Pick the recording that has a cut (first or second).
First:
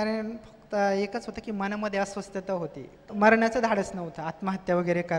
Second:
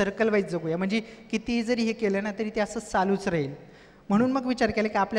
first